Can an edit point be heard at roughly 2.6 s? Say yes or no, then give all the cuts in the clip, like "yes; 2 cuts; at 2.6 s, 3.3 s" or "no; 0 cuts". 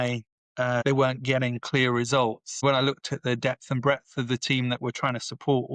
yes; 2 cuts; at 0.8 s, 2.6 s